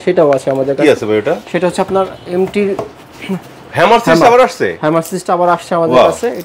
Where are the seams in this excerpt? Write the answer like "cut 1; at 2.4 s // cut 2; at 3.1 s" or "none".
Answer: none